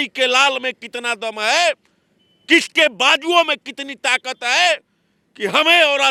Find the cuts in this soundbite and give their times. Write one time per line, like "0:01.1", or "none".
none